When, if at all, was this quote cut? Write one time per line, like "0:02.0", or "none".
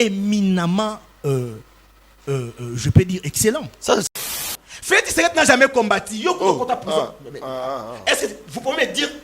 0:04.4